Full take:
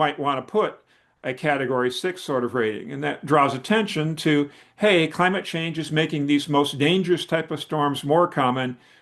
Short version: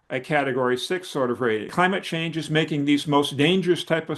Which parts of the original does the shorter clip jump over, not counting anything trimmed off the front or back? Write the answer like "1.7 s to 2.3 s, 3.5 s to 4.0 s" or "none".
2.8 s to 5.1 s